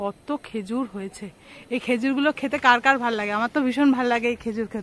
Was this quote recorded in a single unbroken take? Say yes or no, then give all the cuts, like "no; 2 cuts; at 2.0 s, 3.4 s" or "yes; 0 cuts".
yes; 0 cuts